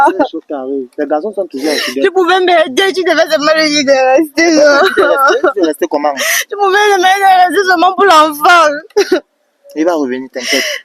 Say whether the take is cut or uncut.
uncut